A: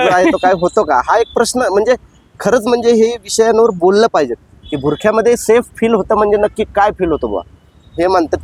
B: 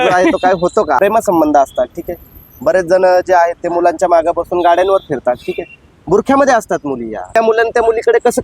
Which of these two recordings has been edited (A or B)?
B